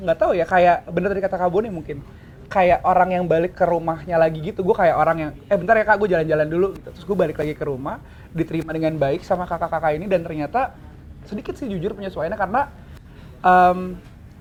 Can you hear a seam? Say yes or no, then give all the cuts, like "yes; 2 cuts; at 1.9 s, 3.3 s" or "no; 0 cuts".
no; 0 cuts